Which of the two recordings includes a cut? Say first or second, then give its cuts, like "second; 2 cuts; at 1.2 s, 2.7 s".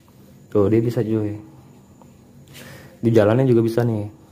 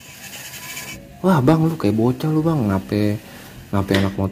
second; 1 cut; at 1.0 s